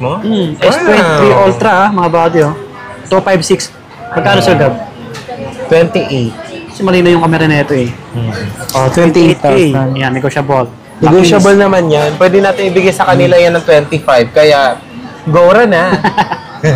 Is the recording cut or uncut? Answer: uncut